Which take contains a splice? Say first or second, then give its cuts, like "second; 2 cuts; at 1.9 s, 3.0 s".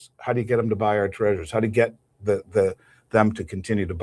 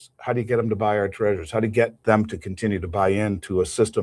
second; 1 cut; at 2.0 s